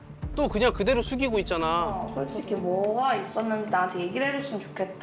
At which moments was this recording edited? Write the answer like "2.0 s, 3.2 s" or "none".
2.1 s

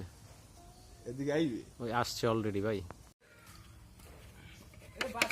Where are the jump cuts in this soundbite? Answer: 3.3 s

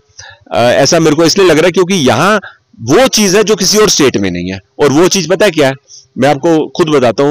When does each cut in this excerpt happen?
none

